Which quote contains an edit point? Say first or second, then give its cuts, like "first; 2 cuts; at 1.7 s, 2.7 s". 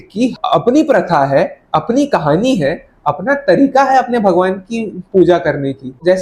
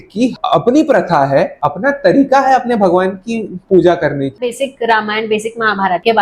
second; 2 cuts; at 1.6 s, 4.5 s